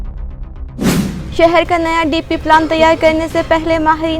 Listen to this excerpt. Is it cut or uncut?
uncut